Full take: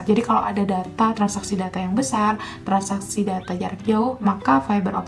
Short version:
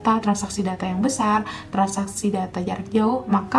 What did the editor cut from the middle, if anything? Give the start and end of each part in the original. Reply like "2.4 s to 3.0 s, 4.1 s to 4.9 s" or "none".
none